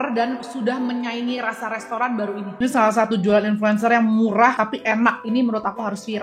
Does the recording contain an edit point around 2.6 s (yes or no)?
yes